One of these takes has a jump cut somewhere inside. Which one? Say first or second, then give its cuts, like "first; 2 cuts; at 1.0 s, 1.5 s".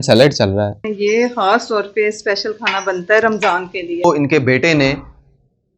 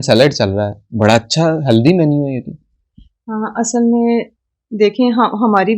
first; 2 cuts; at 0.8 s, 4.0 s